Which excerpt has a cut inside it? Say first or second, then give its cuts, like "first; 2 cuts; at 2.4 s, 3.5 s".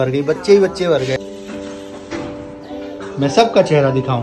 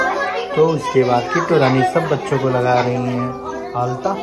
first; 1 cut; at 1.2 s